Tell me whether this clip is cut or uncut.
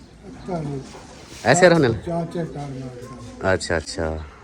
uncut